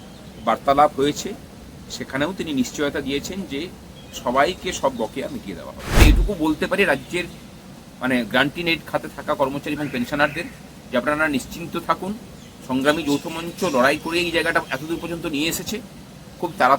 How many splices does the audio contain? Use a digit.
1